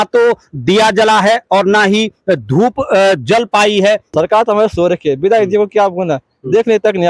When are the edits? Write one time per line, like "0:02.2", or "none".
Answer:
0:04.1